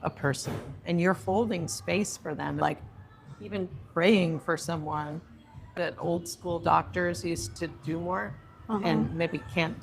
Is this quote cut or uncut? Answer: cut